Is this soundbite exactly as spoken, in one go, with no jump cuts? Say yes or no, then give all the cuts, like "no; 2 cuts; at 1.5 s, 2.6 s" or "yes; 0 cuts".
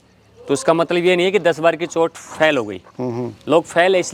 yes; 0 cuts